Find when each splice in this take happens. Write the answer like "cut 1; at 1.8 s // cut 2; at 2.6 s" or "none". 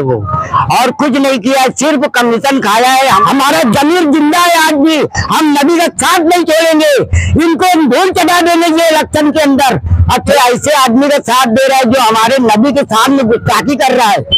cut 1; at 3.2 s // cut 2; at 10.3 s